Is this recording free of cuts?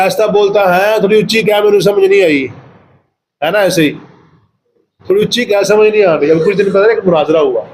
yes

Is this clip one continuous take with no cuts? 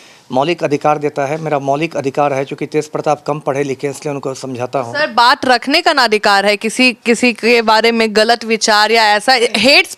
yes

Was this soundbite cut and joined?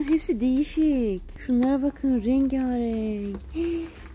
yes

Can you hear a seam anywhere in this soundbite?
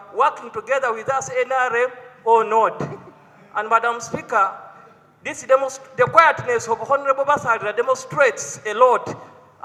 no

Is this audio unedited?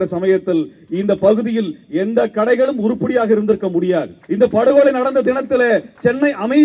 no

